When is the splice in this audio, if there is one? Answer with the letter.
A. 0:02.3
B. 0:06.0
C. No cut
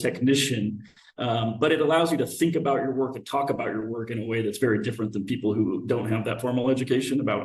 C